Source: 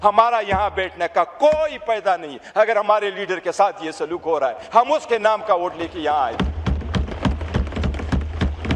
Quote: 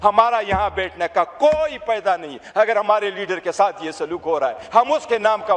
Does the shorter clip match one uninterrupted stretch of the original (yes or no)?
yes